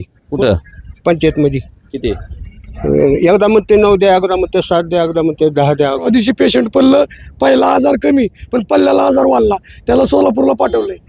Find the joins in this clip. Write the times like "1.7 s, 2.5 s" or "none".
6.1 s